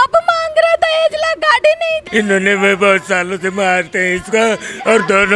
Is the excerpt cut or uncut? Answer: cut